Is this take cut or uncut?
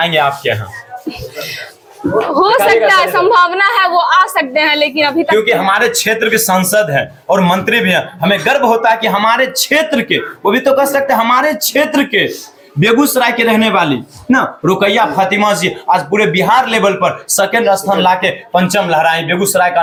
uncut